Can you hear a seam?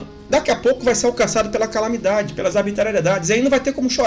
no; 0 cuts

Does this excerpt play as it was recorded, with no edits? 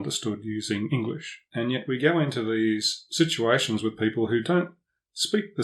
no; 1 cut; at 1.3 s

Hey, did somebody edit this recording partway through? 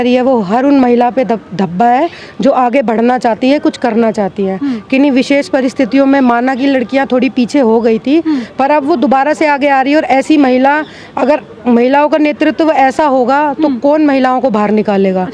no; 0 cuts

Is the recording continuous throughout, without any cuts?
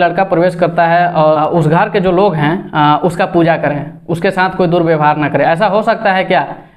no; 1 cut; at 1.4 s

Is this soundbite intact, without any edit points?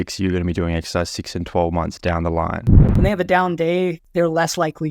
no; 2 cuts; at 2.8 s, 4.0 s

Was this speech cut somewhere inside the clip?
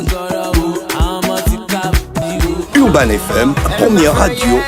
no; 0 cuts

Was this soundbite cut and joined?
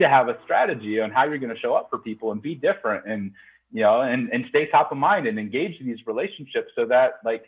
no; 0 cuts

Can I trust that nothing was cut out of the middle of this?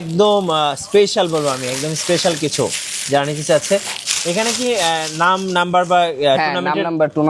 yes; 0 cuts

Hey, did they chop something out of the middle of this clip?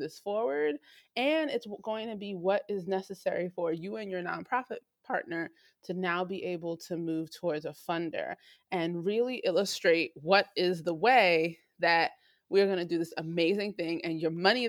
no; 0 cuts

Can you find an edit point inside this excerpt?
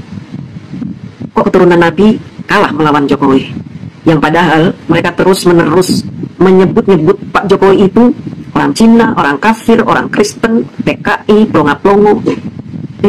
no; 0 cuts

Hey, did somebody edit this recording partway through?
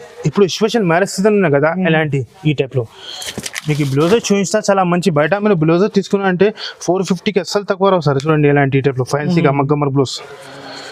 no; 0 cuts

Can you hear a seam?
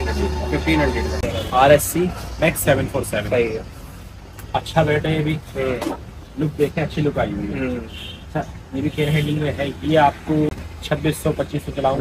yes; 2 cuts; at 1.2 s, 10.5 s

